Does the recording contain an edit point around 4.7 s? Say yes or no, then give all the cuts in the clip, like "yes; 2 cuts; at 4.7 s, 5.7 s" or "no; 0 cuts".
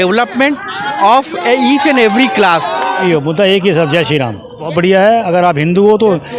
yes; 2 cuts; at 3.0 s, 4.7 s